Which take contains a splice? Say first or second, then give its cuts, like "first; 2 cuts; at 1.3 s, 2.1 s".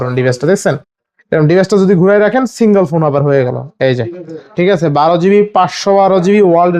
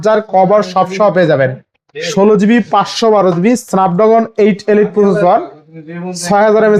first; 1 cut; at 4.5 s